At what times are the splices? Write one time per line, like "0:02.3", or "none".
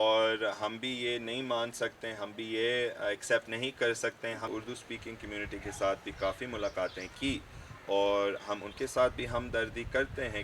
0:04.5